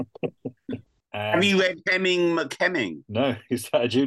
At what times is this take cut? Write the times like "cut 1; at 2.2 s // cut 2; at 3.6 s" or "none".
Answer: cut 1; at 1.0 s // cut 2; at 3.0 s

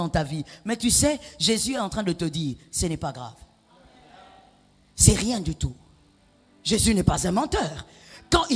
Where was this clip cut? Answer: cut 1; at 6.4 s

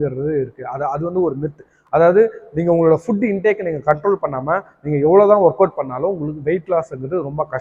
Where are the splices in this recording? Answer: none

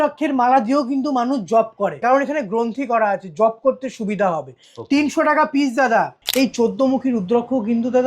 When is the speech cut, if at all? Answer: cut 1; at 2.0 s // cut 2; at 6.2 s

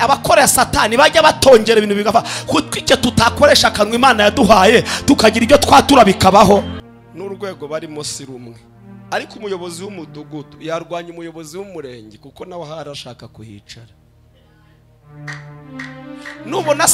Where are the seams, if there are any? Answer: cut 1; at 6.8 s

